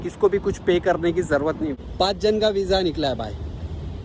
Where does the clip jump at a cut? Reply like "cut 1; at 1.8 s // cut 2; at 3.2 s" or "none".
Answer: cut 1; at 1.8 s

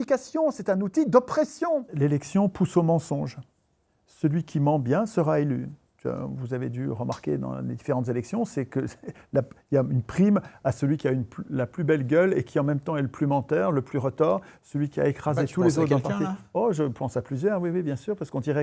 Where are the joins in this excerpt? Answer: cut 1; at 1.9 s

